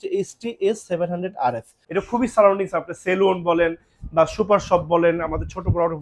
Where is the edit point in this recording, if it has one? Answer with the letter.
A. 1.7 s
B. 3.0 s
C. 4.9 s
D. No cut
A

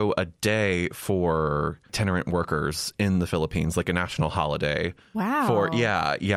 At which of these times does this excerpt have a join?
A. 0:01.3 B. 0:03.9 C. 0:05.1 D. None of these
D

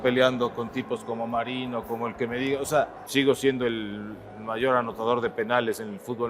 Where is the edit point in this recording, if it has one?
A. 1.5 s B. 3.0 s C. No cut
B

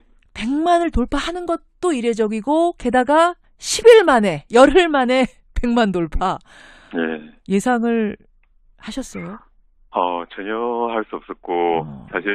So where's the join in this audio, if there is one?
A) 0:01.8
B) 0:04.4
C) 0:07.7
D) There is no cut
B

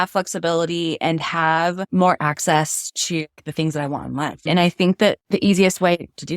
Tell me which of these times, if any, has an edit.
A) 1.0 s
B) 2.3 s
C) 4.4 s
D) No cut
C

